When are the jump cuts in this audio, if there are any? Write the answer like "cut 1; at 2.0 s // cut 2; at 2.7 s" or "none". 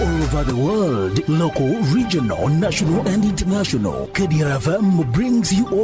none